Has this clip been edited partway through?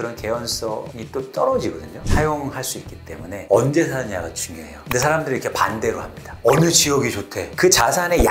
yes; 2 cuts; at 1.9 s, 7.4 s

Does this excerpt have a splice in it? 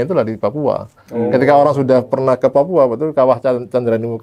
no; 0 cuts

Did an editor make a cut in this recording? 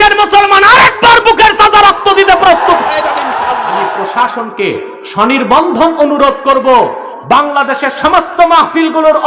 yes; 1 cut; at 4.0 s

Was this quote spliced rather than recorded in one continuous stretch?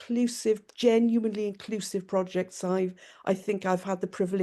no; 0 cuts

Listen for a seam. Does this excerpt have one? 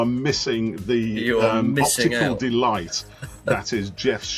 no; 0 cuts

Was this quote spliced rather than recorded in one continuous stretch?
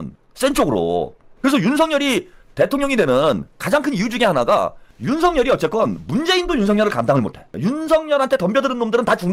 no; 0 cuts

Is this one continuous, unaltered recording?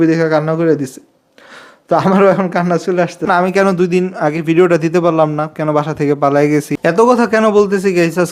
no; 2 cuts; at 3.2 s, 6.7 s

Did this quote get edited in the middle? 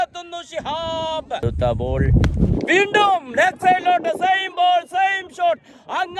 yes; 1 cut; at 1.4 s

